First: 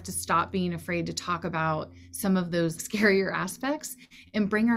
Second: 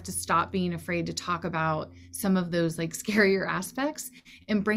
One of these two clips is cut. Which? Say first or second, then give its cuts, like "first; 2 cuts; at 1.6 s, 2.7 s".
first; 1 cut; at 2.8 s